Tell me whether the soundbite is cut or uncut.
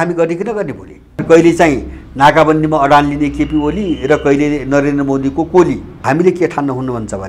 cut